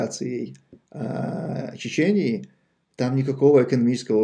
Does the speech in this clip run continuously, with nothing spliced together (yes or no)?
yes